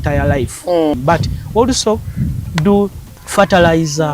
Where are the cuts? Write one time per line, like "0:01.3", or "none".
0:00.9
0:03.1